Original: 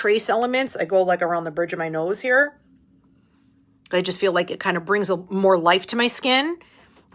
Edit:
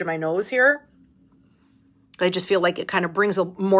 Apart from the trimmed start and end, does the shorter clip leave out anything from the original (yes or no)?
no